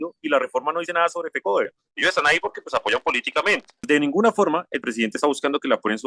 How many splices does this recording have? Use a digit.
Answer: 2